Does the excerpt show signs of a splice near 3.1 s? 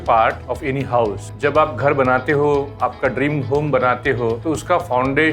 no; 2 cuts; at 1.0 s, 4.4 s

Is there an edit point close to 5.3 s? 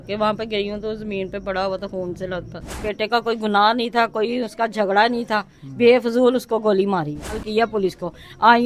no; 2 cuts; at 2.9 s, 7.4 s

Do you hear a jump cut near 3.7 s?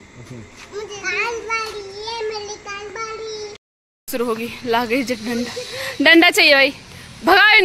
yes; 1 cut; at 3.7 s

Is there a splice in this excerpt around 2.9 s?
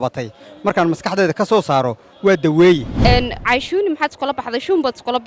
yes; 1 cut; at 2.9 s

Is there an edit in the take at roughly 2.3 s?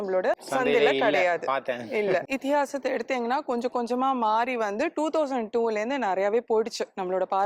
yes; 1 cut; at 2.3 s

